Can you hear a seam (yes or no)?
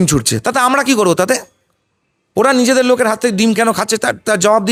no